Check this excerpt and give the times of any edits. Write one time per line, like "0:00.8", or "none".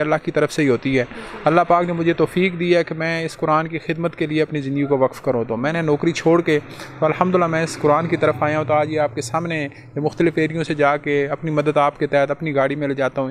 none